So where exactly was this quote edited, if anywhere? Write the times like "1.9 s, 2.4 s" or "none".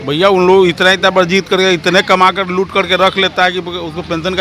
1.1 s